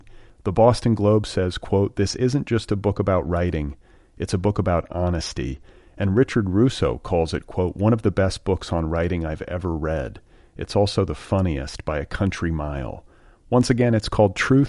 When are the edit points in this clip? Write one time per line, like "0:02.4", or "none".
none